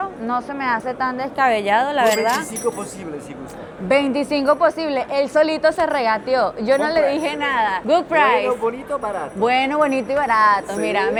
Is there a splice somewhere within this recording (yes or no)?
no